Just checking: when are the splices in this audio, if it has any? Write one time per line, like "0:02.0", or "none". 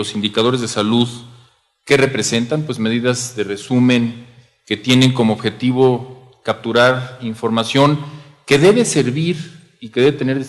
0:08.0